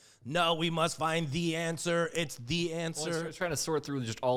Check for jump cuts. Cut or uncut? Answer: uncut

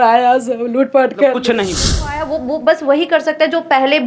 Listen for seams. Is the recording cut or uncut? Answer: cut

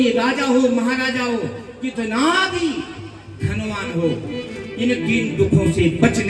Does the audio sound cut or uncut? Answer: uncut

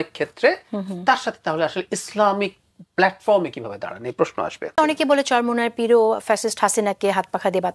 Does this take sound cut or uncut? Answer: cut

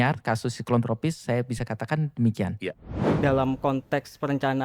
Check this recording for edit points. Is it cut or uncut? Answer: cut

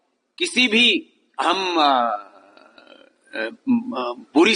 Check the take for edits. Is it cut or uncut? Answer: uncut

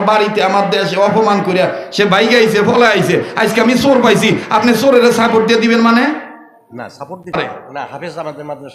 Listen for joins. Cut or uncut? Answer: cut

